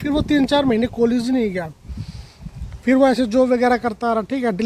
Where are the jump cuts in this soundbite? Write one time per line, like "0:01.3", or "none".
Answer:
none